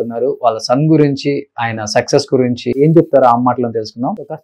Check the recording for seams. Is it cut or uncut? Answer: cut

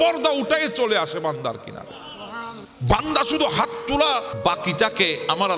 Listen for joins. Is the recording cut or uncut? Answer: cut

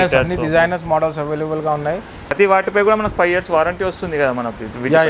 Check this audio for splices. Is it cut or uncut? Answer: cut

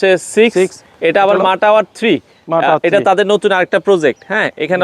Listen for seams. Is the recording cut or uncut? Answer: uncut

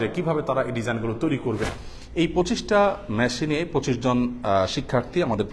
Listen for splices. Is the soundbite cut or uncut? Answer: cut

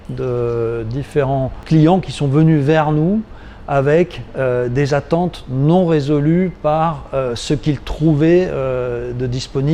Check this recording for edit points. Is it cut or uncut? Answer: uncut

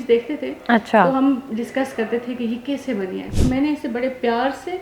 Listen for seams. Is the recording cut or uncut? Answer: cut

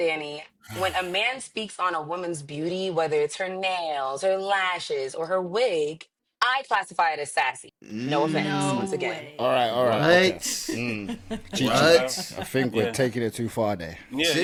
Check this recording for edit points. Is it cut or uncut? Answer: uncut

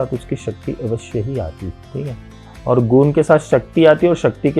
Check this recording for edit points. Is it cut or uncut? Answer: cut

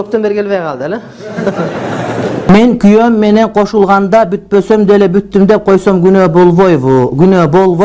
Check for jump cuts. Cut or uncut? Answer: cut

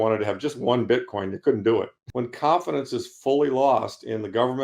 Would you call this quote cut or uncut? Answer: cut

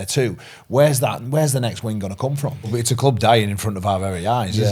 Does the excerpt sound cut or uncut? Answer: cut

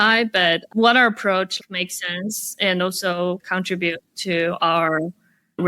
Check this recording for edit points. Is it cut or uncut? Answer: cut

